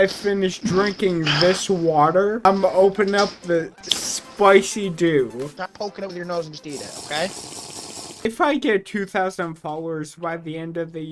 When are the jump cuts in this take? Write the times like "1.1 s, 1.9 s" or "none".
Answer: 2.4 s